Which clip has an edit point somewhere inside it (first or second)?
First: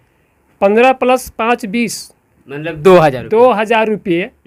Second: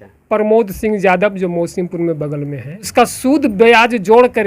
second